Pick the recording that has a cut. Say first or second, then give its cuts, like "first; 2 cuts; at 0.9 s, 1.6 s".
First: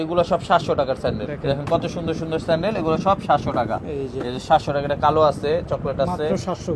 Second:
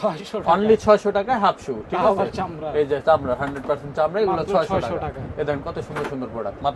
first; 1 cut; at 1.3 s